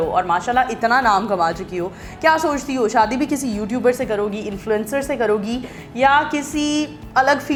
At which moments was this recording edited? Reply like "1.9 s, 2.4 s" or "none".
none